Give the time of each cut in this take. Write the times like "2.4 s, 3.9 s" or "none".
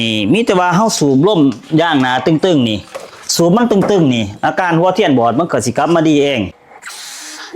6.5 s